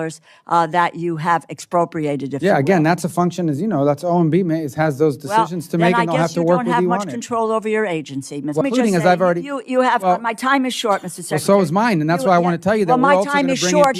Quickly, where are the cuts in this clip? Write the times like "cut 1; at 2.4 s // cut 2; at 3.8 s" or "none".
cut 1; at 8.6 s